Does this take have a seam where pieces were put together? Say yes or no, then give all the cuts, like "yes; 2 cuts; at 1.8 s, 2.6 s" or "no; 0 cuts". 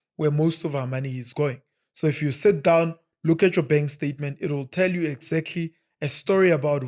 no; 0 cuts